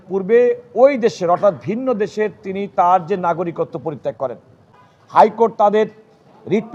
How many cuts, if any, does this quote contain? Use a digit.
0